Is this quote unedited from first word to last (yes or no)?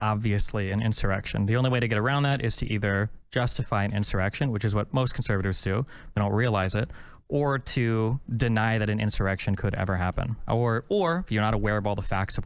yes